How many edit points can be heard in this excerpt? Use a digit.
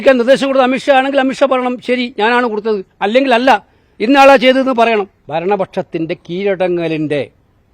1